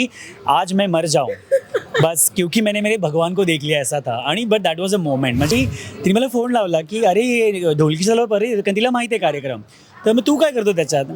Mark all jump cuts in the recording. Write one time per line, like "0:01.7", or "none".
0:05.5